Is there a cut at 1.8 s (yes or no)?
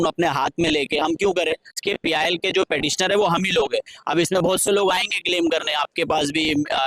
yes